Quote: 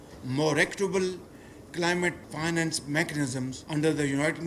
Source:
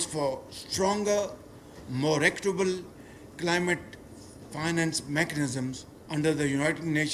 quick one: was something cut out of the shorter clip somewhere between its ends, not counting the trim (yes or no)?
yes